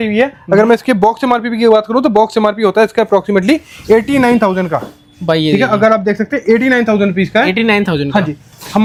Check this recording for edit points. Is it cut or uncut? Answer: uncut